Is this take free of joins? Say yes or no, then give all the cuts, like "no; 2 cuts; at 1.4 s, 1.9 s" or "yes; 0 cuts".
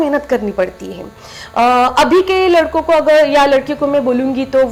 yes; 0 cuts